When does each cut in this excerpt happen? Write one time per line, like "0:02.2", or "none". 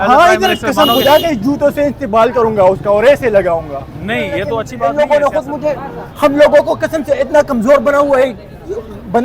0:04.7

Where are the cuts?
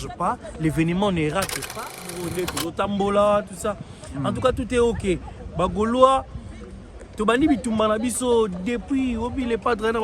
0:01.8

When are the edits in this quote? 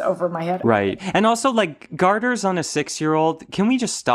0:00.9

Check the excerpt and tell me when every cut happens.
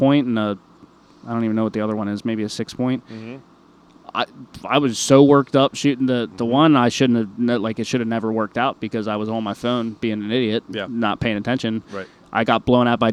none

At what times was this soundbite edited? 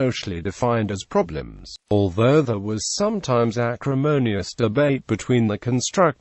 0:04.4

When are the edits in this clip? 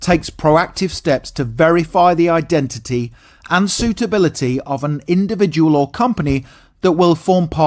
none

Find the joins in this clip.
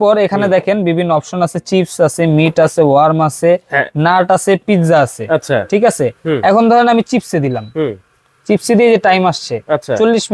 none

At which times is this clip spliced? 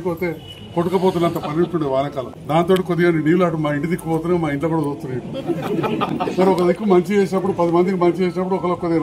0:02.3

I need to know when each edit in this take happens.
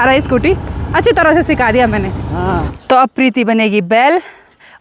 0:02.8

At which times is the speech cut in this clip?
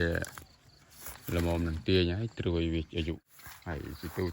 0:03.3

